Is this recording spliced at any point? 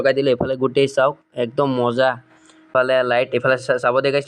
yes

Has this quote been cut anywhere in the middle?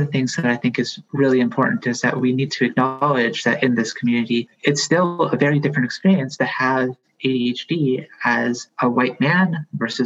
yes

